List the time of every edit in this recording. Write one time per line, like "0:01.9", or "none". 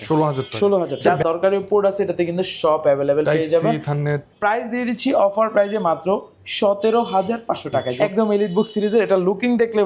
0:01.0
0:04.3
0:07.9